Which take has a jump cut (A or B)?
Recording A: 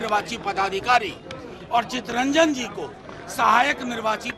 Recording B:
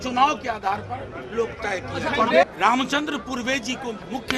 B